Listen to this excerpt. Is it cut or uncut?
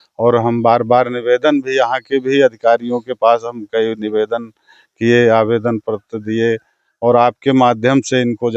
uncut